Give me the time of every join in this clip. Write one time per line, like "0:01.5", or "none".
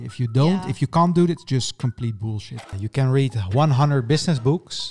0:02.6

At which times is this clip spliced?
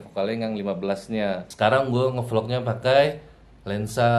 0:01.5

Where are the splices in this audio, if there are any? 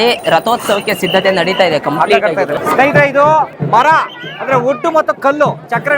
0:02.5
0:03.6

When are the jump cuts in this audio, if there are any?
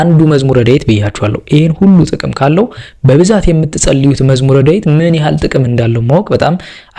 none

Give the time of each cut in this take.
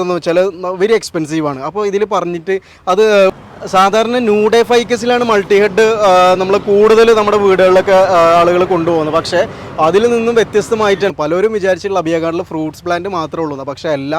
0:03.3
0:11.1

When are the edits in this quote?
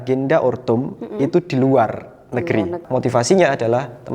0:02.8

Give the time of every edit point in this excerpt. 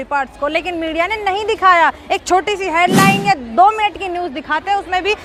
none

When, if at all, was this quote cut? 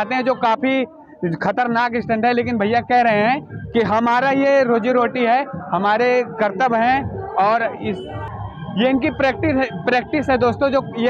none

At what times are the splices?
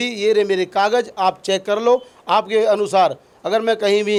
none

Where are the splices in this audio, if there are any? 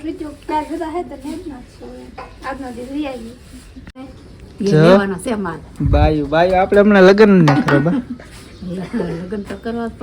0:04.1

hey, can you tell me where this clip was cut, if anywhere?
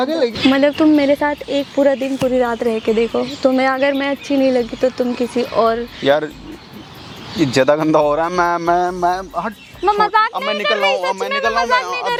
none

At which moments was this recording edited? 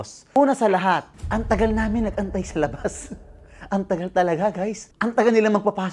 0:01.2
0:04.8

